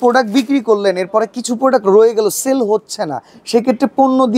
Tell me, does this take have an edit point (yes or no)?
no